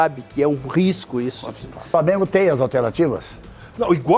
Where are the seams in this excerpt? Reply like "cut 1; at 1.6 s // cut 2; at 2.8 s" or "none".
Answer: cut 1; at 1.9 s